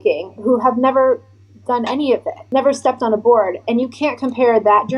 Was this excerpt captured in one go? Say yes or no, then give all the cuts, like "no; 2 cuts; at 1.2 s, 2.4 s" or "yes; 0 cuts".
no; 1 cut; at 2.3 s